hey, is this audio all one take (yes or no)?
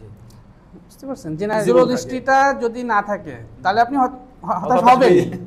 no